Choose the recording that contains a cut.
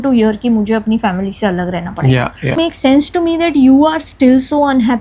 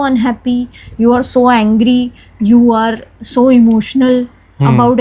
first; 1 cut; at 2.6 s

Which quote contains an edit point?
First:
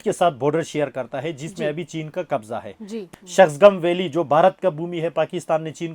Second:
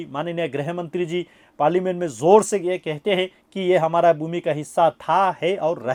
first; 1 cut; at 3.0 s

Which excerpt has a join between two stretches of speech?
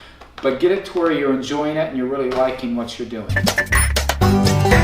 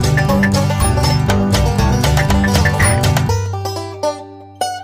first; 1 cut; at 3.3 s

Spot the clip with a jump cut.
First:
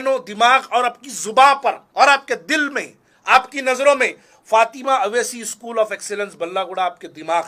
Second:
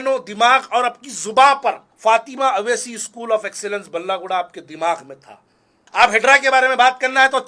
second; 2 cuts; at 1.8 s, 5.5 s

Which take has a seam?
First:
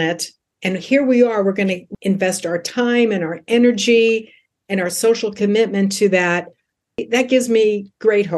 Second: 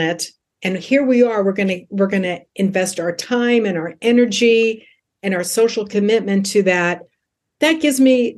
first; 2 cuts; at 1.9 s, 7.0 s

